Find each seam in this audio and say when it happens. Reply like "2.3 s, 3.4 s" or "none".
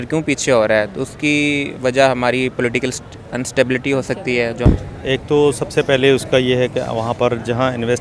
4.6 s